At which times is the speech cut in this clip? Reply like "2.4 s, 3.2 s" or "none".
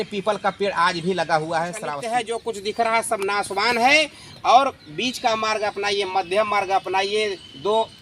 2.0 s